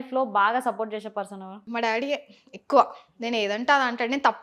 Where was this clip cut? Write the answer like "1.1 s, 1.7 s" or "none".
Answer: 1.6 s

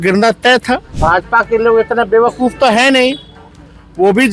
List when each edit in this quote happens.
1.0 s

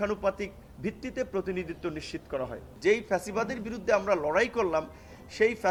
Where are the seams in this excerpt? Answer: none

